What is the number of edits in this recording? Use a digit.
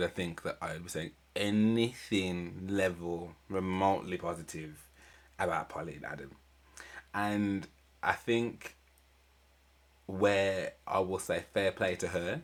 0